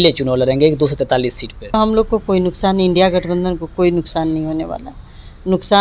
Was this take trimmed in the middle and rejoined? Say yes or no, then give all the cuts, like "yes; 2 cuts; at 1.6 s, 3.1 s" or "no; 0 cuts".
yes; 1 cut; at 1.7 s